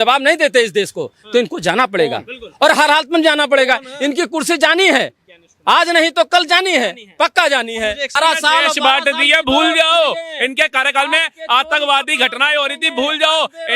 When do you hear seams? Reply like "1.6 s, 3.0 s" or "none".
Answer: 8.2 s